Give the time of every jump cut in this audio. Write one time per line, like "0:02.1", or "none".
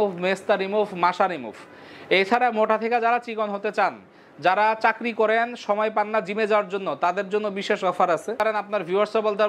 0:08.4